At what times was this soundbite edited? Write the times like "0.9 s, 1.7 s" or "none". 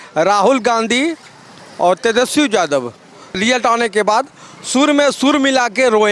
none